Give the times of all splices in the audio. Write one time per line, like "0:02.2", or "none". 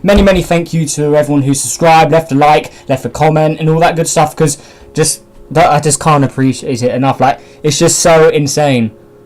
0:05.8